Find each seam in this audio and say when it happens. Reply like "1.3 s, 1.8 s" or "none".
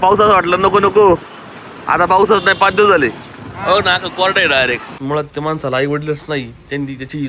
4.9 s

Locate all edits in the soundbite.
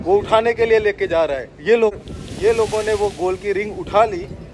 1.9 s

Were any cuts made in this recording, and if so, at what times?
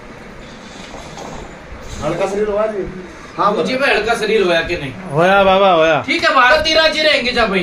6.5 s

